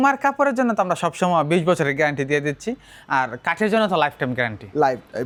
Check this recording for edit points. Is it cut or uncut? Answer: uncut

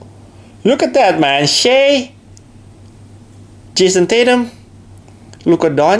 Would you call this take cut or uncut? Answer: uncut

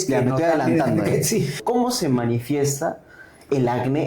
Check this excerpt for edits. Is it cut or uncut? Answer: cut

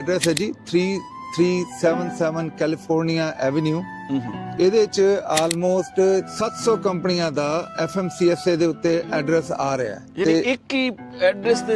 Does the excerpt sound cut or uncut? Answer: cut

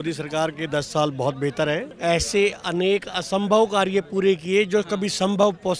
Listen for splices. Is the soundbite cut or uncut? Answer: uncut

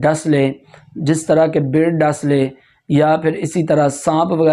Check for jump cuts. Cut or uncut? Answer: uncut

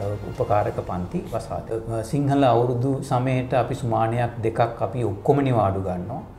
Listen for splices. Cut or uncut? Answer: cut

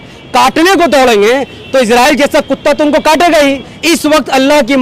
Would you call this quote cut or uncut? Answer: cut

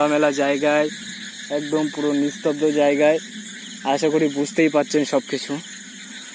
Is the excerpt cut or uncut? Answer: uncut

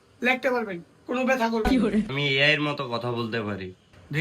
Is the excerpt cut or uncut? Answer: cut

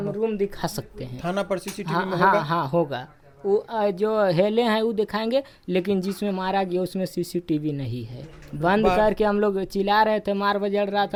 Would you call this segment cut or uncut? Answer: uncut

